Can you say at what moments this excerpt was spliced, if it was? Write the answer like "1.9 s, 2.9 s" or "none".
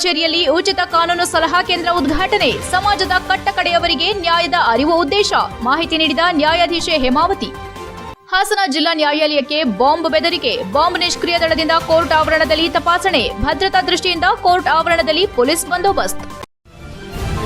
16.4 s